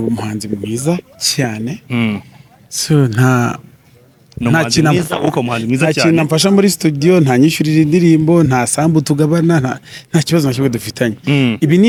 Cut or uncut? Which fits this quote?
uncut